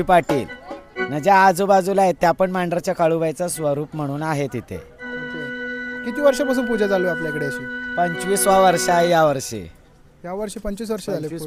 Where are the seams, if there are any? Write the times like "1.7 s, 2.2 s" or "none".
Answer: none